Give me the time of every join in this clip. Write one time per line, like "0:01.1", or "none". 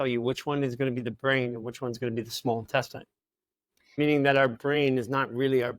0:03.9